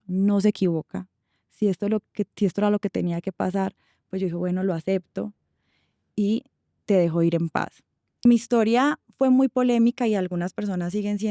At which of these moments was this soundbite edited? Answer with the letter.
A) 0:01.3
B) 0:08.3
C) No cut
B